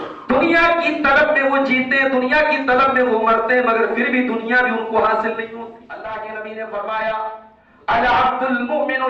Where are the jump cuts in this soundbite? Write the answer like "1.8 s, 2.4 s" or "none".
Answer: 5.8 s